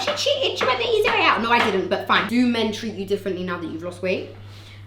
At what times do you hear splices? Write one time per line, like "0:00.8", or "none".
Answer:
0:02.2